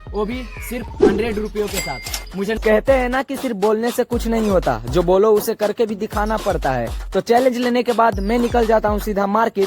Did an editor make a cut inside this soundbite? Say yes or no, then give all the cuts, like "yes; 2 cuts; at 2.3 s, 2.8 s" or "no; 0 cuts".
yes; 1 cut; at 2.6 s